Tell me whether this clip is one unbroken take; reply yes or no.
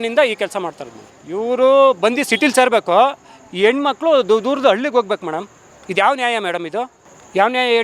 yes